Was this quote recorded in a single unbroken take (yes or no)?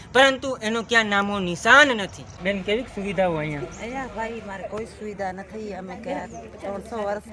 no